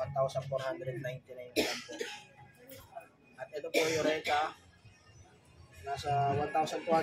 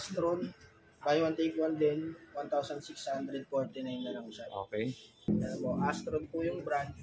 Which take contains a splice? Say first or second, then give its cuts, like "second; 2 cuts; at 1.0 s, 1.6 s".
second; 1 cut; at 5.3 s